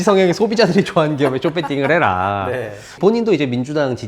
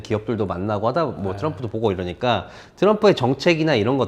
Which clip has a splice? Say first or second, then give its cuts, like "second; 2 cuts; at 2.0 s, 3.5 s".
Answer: first; 1 cut; at 2.9 s